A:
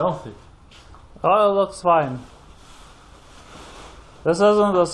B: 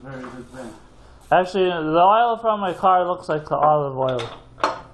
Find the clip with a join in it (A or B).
A